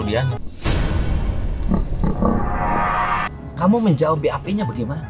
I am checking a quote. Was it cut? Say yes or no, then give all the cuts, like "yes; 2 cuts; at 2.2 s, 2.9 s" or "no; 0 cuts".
yes; 1 cut; at 3.3 s